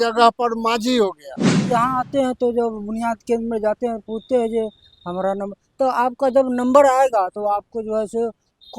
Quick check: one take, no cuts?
no; 1 cut; at 1.6 s

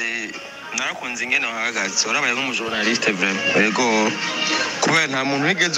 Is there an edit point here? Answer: no; 0 cuts

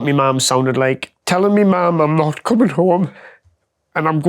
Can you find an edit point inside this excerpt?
yes; 1 cut; at 1.1 s

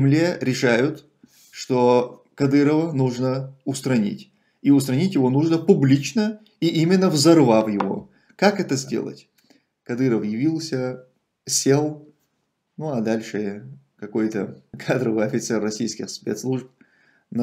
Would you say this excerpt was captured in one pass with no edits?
no; 2 cuts; at 9.2 s, 14.7 s

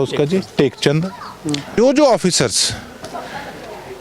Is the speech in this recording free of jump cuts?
no; 1 cut; at 1.7 s

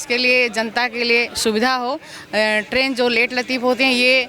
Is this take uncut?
yes; 0 cuts

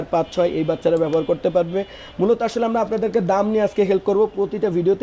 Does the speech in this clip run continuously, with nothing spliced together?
yes; 0 cuts

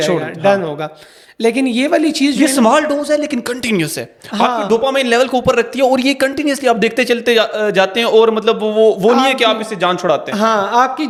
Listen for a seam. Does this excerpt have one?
no; 0 cuts

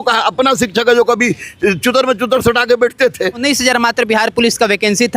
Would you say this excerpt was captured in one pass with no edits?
no; 1 cut; at 3.4 s

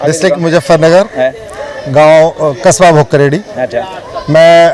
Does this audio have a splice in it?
no; 0 cuts

